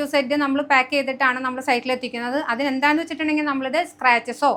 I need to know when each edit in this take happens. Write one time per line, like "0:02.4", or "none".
none